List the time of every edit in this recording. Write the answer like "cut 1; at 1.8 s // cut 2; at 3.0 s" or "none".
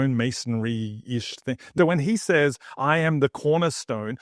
cut 1; at 1.6 s